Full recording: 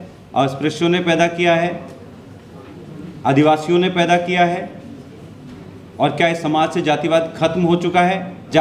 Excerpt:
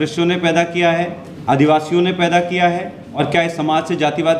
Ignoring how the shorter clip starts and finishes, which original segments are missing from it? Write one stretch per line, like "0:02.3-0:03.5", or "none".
0:01.9-0:03.0
0:04.9-0:06.0